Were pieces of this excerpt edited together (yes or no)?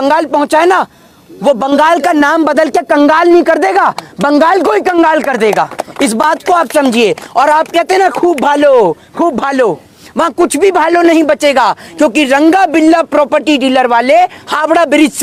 no